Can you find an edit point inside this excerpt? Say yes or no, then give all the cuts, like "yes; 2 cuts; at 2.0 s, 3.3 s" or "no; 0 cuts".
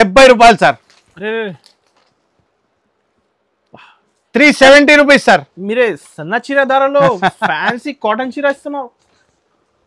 no; 0 cuts